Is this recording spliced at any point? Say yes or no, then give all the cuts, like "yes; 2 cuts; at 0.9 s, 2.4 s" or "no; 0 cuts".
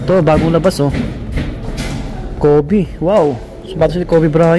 no; 0 cuts